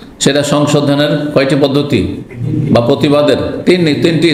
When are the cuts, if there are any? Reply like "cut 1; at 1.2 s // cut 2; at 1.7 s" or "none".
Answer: none